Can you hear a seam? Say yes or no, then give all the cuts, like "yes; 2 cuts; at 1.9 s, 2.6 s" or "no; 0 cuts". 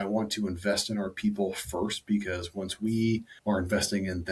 yes; 1 cut; at 3.3 s